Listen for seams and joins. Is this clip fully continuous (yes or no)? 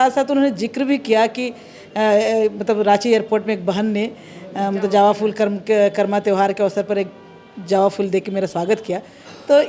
yes